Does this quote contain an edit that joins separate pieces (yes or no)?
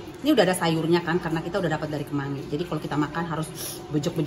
no